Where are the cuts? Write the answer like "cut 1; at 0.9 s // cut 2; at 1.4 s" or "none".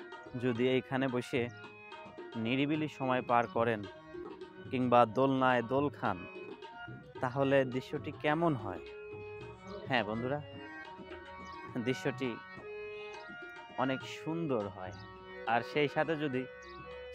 none